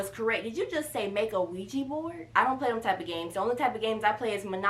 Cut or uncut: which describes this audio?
cut